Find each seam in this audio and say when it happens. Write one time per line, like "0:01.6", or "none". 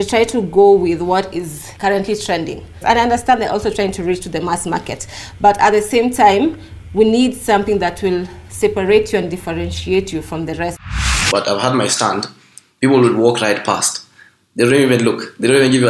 0:01.6
0:02.7
0:10.8